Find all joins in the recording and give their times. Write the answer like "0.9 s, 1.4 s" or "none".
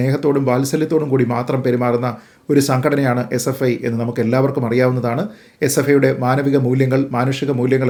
none